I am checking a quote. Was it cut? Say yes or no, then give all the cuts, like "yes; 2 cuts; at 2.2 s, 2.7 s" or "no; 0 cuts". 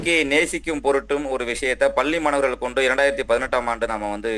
no; 0 cuts